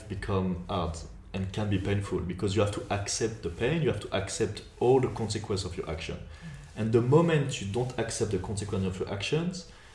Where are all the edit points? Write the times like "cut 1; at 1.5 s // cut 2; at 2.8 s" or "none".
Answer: cut 1; at 1.1 s